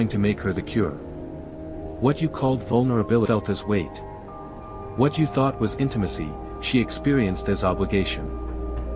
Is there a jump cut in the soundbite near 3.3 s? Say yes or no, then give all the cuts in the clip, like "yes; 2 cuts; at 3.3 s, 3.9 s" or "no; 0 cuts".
yes; 1 cut; at 3.3 s